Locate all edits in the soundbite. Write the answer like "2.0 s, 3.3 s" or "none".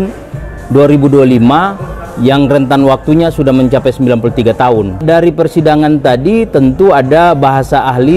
5.0 s